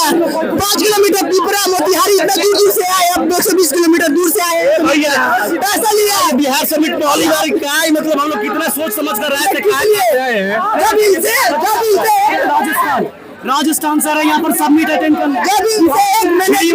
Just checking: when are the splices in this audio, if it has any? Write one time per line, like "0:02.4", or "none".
none

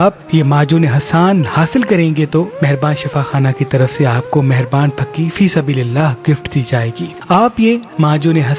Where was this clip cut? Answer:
0:07.1

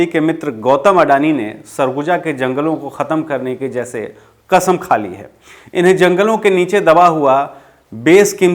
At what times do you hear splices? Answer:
none

